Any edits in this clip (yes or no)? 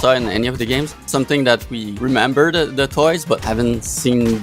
yes